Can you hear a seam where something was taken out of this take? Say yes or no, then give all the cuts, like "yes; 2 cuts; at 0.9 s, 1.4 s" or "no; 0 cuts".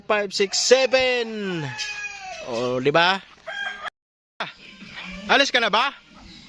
yes; 1 cut; at 3.9 s